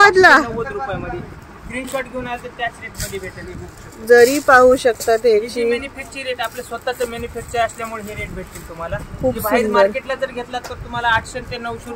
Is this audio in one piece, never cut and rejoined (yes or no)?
yes